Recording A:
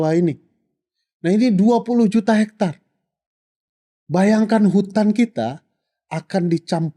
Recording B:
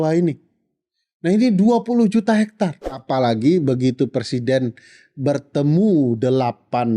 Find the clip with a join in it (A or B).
B